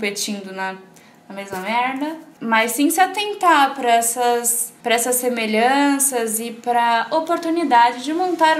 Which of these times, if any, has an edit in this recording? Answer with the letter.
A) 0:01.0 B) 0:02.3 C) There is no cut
C